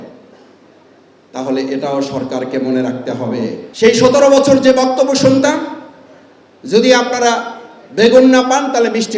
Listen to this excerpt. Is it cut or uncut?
cut